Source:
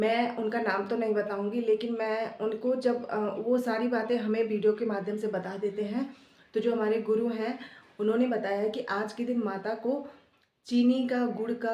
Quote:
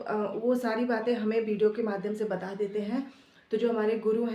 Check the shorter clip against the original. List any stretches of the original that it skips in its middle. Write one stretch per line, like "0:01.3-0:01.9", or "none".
none

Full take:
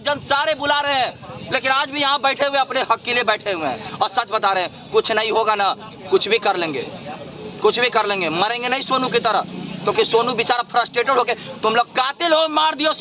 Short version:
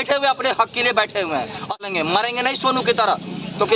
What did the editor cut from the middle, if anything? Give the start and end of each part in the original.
0:04.1-0:08.1

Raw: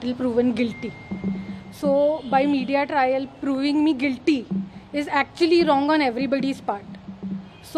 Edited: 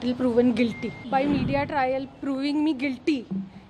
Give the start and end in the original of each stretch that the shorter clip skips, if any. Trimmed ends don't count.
0:01.0-0:02.2

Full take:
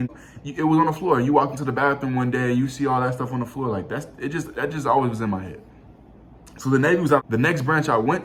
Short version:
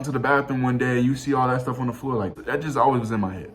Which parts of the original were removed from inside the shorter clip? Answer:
0:03.9-0:04.5

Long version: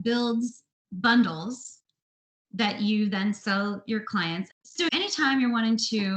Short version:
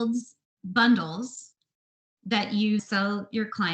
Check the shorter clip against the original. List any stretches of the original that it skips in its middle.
0:03.1-0:03.4

